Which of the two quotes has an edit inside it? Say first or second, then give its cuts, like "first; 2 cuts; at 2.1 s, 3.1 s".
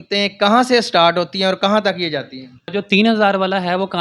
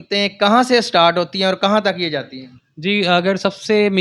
first; 1 cut; at 2.7 s